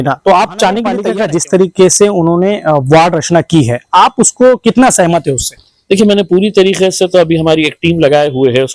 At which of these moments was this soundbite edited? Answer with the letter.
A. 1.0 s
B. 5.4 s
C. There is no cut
A